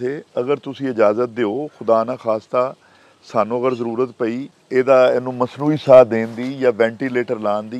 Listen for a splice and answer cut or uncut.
cut